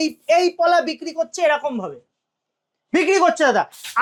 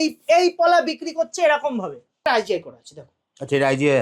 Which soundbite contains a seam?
second; 1 cut; at 2.2 s

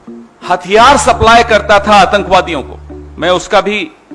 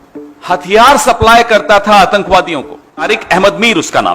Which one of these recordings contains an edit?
second; 1 cut; at 3.1 s

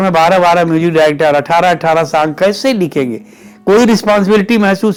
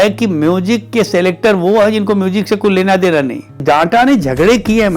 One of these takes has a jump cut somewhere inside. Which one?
second; 1 cut; at 3.6 s

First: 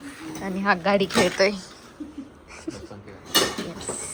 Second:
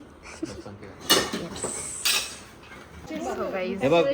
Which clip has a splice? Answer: second; 1 cut; at 3.1 s

